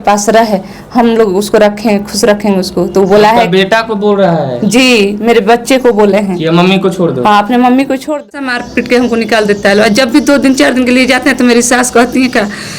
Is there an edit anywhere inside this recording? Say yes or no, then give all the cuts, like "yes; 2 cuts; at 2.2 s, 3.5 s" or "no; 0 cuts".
yes; 1 cut; at 8.6 s